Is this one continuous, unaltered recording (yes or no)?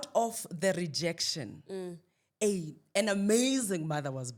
yes